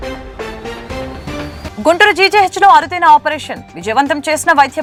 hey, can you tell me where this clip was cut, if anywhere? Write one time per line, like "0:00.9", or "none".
none